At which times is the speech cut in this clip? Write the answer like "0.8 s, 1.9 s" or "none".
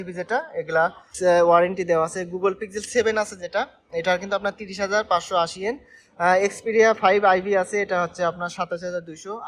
1.1 s